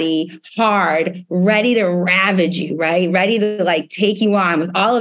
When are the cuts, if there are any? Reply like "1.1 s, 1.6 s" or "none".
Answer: none